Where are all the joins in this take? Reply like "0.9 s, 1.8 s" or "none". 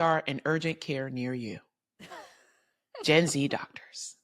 none